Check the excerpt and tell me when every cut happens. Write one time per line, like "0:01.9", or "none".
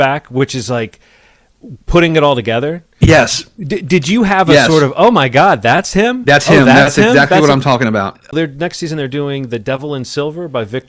0:08.3